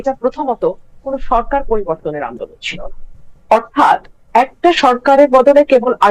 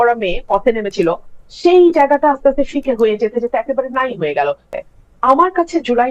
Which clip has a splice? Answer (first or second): second